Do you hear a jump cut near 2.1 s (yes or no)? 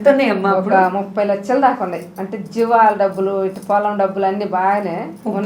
no